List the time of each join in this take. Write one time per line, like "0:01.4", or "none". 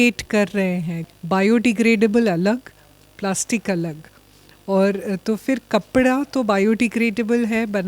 0:01.0